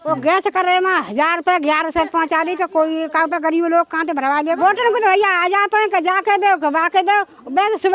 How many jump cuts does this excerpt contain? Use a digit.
1